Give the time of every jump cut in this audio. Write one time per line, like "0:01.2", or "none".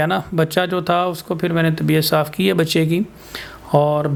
none